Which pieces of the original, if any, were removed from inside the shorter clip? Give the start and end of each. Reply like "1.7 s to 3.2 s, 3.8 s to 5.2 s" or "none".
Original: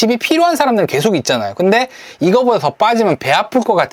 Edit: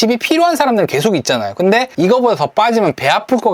1.9 s to 2.1 s